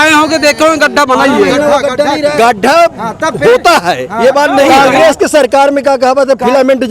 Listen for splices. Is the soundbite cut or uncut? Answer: cut